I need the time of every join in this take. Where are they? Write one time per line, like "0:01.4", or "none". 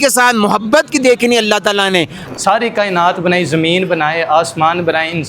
0:02.2